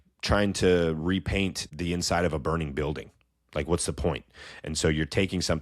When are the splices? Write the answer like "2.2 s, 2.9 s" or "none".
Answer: 1.7 s